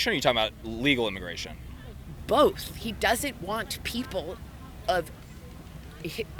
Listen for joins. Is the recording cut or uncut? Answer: uncut